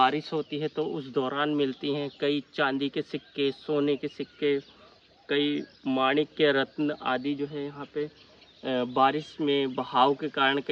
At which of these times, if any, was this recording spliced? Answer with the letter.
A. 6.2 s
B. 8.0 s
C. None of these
C